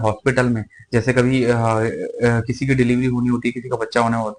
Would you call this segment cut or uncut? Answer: uncut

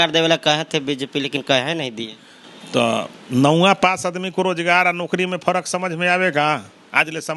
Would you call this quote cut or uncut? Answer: uncut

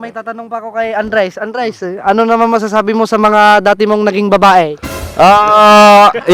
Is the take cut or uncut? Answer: uncut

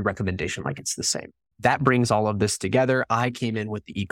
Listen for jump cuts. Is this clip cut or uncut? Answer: cut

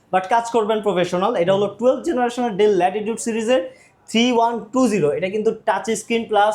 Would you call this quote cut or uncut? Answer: uncut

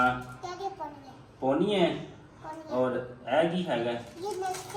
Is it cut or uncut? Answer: uncut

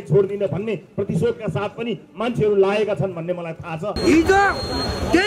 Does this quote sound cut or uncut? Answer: cut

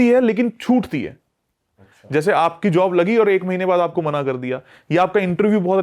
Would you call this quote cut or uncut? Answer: uncut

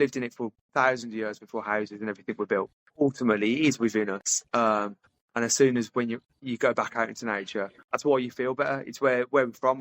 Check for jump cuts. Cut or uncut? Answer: cut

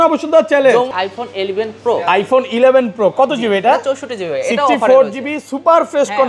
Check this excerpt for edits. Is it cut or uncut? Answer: cut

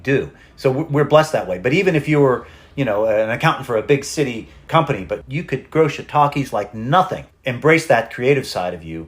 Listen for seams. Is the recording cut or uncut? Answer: cut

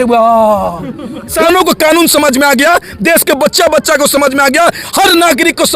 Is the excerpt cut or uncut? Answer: cut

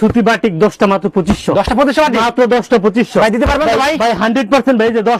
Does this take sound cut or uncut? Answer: uncut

